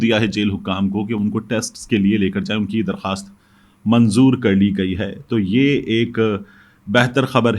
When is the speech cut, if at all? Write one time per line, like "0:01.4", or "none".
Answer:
none